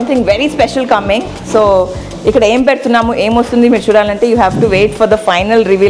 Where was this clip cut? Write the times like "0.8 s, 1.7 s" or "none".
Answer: none